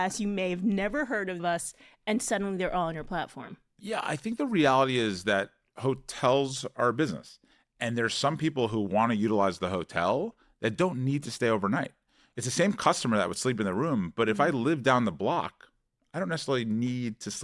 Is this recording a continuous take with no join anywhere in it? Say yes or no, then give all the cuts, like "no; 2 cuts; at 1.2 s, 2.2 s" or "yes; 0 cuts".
yes; 0 cuts